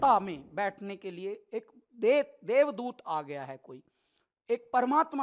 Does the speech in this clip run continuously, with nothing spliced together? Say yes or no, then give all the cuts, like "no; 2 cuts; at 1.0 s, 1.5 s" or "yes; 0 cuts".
yes; 0 cuts